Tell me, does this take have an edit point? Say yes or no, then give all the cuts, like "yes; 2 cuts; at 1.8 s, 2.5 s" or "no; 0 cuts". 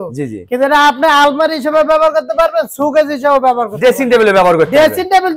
no; 0 cuts